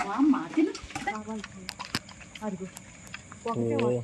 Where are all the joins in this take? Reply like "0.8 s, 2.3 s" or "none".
1.1 s